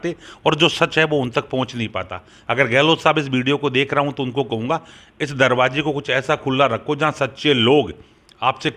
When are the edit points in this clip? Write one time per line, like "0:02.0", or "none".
none

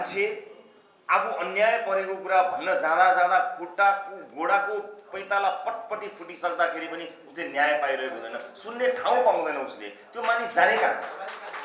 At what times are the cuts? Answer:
none

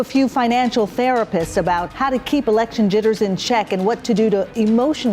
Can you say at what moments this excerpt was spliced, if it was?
0:01.9

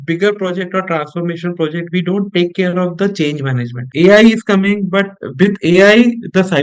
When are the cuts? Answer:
0:03.9

